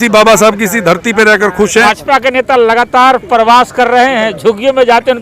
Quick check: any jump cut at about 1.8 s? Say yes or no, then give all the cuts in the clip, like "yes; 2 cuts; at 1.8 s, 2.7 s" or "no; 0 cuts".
yes; 1 cut; at 1.8 s